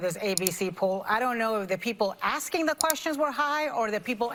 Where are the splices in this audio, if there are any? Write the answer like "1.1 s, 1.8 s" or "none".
none